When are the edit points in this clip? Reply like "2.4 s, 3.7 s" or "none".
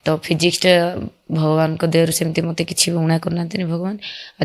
none